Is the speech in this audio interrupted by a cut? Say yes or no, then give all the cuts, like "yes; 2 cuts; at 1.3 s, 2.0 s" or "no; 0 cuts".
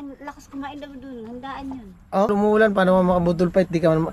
yes; 1 cut; at 2.3 s